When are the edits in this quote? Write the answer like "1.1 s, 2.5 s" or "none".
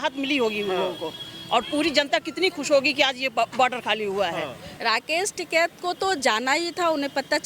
4.6 s